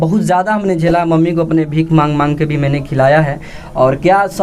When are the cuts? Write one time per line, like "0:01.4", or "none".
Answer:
none